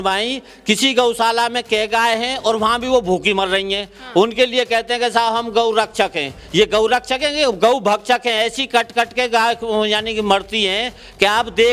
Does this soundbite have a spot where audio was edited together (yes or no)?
no